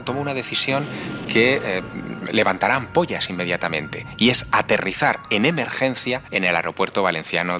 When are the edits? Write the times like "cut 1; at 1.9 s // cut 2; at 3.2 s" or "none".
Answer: cut 1; at 6.3 s